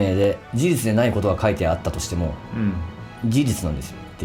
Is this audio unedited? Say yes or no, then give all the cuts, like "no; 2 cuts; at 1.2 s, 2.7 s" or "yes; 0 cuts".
yes; 0 cuts